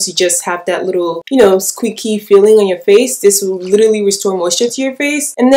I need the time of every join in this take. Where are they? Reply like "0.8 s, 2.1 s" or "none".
none